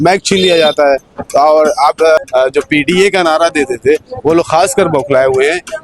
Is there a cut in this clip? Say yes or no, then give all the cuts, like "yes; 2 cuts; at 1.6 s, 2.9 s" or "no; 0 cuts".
yes; 1 cut; at 2.2 s